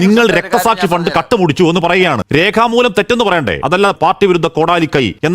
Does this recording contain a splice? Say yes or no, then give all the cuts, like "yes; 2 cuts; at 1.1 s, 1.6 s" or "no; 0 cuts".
yes; 2 cuts; at 2.3 s, 3.9 s